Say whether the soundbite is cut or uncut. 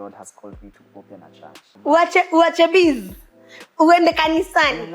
cut